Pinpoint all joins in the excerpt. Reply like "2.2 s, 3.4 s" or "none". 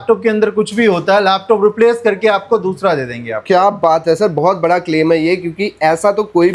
none